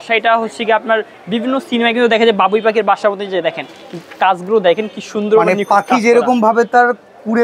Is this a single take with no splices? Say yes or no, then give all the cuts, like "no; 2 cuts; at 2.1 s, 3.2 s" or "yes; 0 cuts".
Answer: yes; 0 cuts